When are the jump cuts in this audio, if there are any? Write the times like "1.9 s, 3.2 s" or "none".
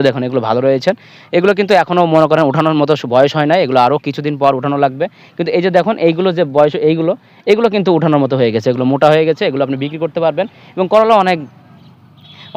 none